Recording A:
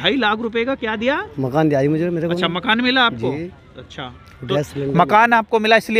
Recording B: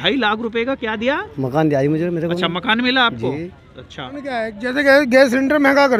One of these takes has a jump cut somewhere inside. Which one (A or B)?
B